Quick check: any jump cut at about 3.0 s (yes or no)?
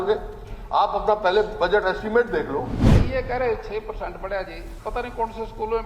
yes